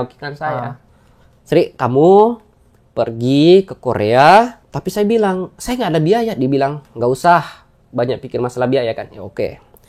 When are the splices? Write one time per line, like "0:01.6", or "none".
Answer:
0:04.7